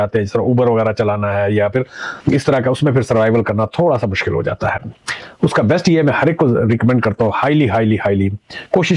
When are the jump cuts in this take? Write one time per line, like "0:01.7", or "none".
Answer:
none